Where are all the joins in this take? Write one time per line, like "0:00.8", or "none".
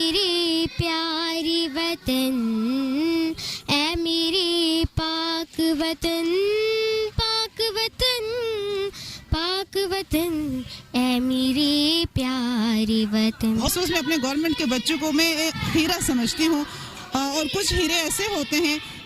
0:13.7

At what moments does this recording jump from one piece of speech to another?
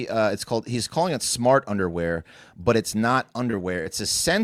none

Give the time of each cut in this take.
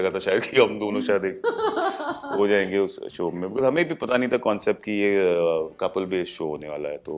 none

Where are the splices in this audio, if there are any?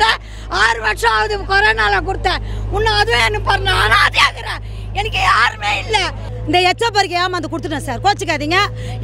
0:06.3

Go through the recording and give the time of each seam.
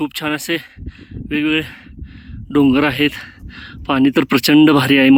none

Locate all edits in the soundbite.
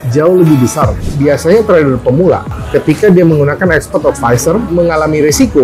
0:01.0
0:02.5
0:04.7

